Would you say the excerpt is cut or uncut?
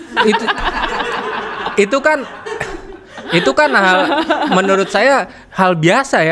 uncut